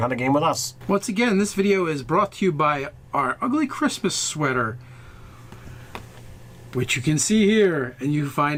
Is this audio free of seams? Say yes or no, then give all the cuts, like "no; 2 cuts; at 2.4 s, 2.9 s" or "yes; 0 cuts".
yes; 0 cuts